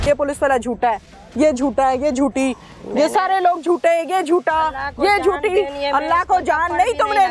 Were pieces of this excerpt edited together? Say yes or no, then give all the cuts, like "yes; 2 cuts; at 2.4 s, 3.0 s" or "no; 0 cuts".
no; 0 cuts